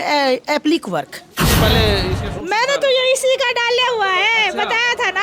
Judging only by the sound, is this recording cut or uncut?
cut